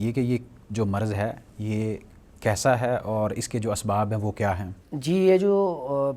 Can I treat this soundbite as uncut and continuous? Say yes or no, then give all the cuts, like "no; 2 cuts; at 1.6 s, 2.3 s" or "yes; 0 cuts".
yes; 0 cuts